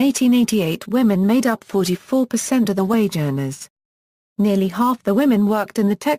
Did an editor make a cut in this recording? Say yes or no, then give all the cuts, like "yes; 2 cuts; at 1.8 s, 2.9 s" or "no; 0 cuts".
yes; 1 cut; at 3.6 s